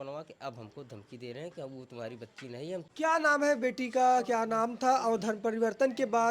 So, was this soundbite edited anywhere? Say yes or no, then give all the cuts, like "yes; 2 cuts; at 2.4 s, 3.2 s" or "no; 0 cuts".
yes; 1 cut; at 2.9 s